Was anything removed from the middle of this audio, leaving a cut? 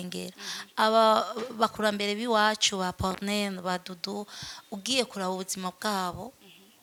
no; 0 cuts

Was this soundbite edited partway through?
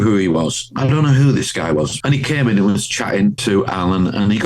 yes; 2 cuts; at 1.9 s, 3.4 s

